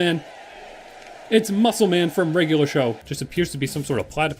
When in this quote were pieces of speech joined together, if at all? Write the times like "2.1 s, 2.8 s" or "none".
3.1 s